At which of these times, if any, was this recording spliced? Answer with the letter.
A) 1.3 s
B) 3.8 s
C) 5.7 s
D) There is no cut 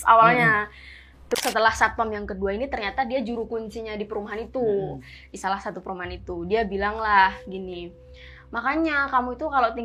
A